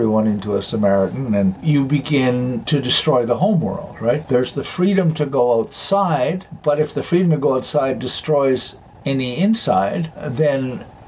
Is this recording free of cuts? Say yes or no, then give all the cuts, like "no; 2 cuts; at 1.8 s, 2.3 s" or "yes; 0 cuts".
no; 2 cuts; at 1.6 s, 4.2 s